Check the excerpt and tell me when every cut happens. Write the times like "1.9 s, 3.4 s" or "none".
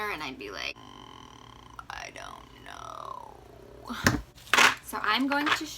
4.4 s